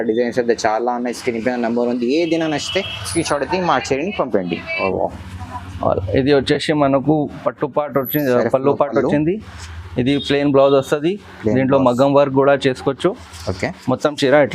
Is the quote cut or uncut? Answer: cut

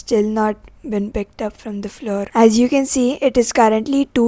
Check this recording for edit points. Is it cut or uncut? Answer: uncut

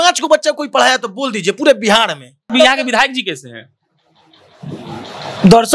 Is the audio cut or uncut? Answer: cut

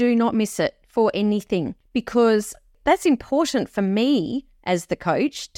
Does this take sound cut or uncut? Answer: cut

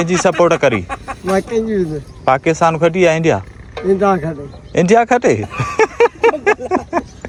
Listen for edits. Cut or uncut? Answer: uncut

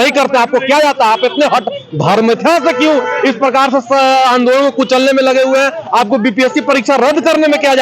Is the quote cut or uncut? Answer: uncut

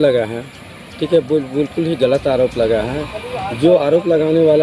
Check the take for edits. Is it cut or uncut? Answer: uncut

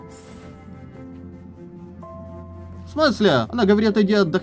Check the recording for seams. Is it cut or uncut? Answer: cut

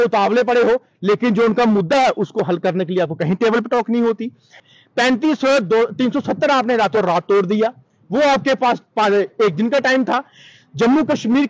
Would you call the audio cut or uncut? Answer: cut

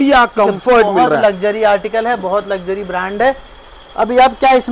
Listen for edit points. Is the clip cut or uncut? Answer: uncut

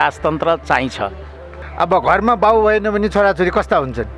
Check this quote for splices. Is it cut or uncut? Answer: uncut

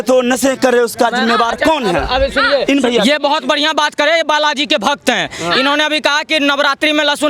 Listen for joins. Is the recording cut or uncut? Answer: uncut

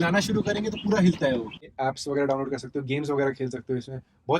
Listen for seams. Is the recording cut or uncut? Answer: cut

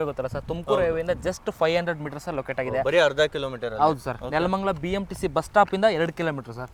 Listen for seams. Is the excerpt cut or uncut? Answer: uncut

